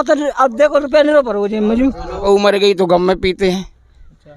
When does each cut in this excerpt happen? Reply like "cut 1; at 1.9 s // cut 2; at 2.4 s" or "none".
cut 1; at 2.2 s